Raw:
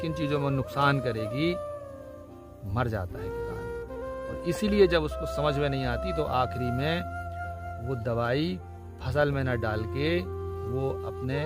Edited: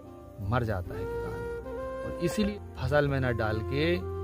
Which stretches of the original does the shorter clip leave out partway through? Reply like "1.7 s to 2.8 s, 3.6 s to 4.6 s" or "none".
4.7 s to 8.7 s